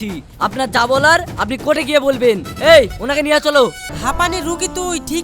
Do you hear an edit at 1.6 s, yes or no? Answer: no